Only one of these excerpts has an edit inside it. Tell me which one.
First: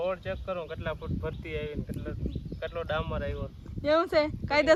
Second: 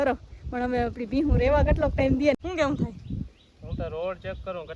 second; 1 cut; at 2.4 s

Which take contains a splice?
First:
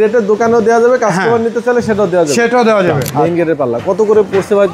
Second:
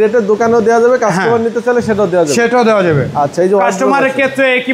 first; 1 cut; at 3.1 s

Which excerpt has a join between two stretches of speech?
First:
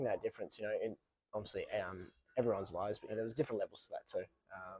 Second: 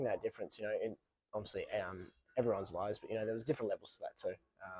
first; 1 cut; at 3.1 s

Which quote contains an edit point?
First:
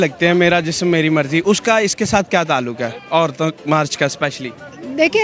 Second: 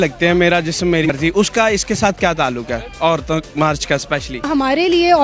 second; 2 cuts; at 1.1 s, 4.4 s

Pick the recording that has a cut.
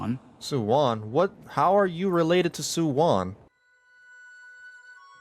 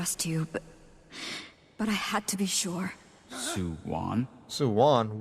first; 1 cut; at 3.5 s

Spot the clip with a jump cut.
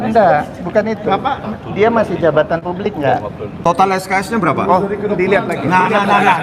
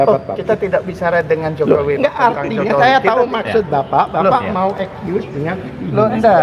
first; 2 cuts; at 3.5 s, 4.8 s

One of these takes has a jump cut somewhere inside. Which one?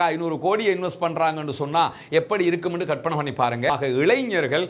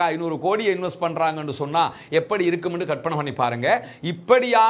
first; 1 cut; at 3.7 s

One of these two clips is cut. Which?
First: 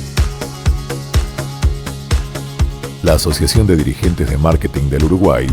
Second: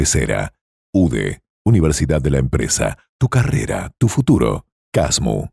first; 1 cut; at 2.6 s

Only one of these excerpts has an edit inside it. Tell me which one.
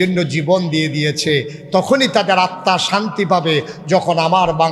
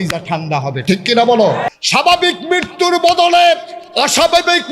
second; 1 cut; at 1.6 s

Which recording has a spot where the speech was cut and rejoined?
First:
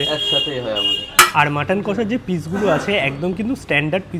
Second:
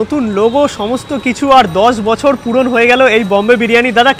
first; 1 cut; at 1.3 s

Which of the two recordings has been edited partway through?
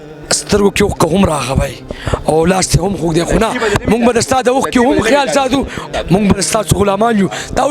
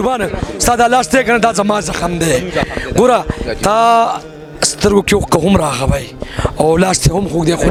first; 1 cut; at 5.8 s

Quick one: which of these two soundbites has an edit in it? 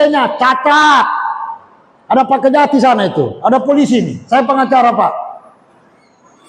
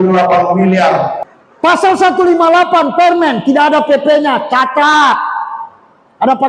second; 1 cut; at 1.3 s

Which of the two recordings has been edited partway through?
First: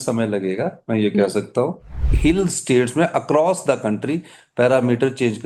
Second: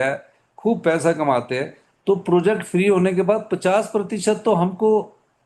first; 1 cut; at 2.0 s

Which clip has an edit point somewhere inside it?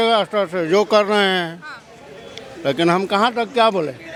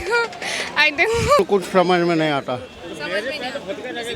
second; 1 cut; at 1.4 s

